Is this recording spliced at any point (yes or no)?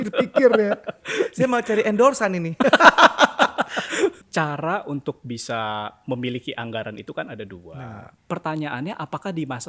yes